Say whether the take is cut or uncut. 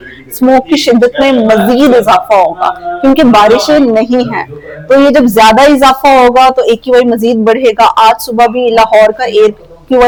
uncut